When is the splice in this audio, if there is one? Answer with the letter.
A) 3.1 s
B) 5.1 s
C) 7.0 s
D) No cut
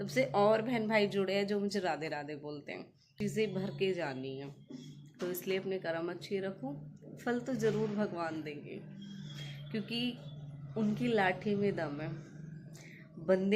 A